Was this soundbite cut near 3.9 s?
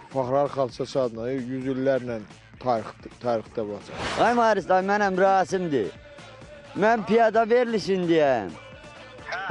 yes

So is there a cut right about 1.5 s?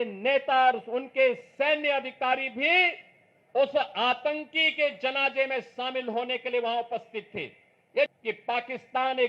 no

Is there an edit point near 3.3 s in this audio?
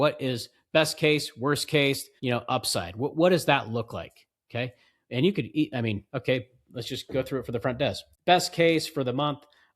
no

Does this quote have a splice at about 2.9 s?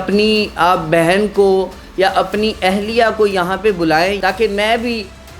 no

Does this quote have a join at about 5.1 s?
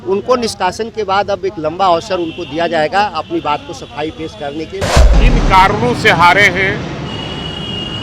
yes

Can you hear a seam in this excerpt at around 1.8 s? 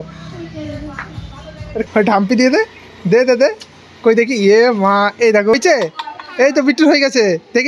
yes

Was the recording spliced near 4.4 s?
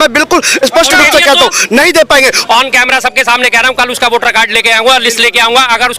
no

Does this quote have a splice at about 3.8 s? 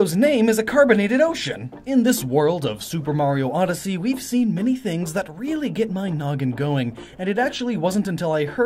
yes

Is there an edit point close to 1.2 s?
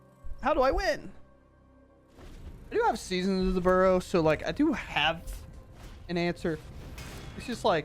no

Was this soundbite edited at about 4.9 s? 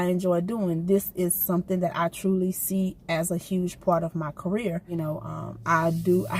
yes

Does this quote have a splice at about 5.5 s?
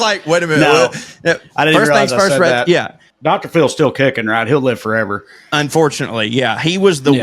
no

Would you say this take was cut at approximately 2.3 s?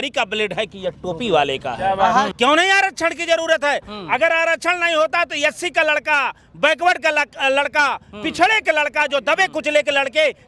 yes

